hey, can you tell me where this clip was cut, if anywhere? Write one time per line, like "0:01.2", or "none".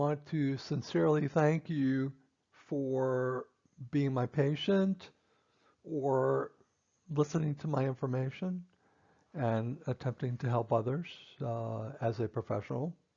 0:02.9